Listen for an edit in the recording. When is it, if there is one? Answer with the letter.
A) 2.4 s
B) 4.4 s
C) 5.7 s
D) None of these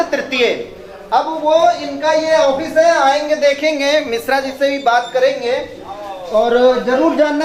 D